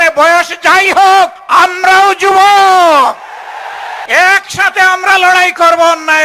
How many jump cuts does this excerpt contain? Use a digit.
2